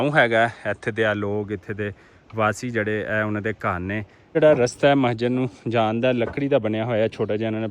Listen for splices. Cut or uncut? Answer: cut